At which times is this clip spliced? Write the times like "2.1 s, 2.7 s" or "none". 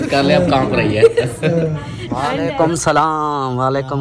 2.4 s